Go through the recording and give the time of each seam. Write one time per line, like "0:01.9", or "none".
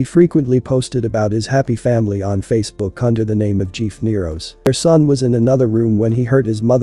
0:04.7